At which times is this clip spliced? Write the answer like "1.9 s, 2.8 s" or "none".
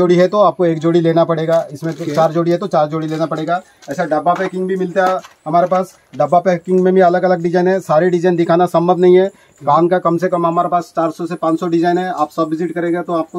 none